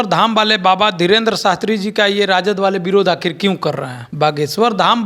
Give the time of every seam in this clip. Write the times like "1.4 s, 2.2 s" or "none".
none